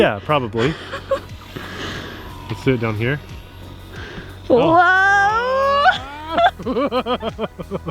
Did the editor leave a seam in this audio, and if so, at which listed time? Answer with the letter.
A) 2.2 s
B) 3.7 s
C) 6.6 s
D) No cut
D